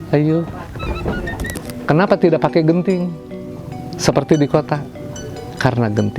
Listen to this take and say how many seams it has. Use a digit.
1